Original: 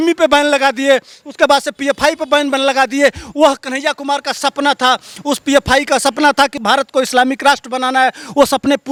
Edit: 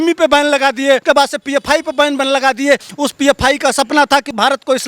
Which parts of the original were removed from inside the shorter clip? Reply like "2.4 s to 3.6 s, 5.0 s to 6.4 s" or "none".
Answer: 1.0 s to 1.3 s, 3.2 s to 5.2 s